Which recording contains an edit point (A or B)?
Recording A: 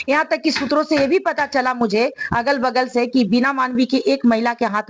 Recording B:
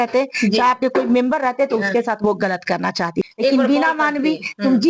B